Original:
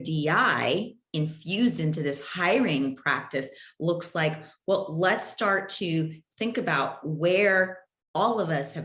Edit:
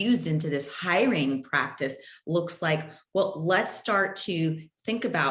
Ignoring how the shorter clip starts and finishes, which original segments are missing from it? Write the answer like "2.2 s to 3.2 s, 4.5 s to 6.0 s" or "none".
none